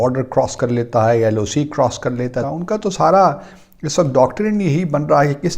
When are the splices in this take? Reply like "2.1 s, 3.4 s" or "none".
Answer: 2.4 s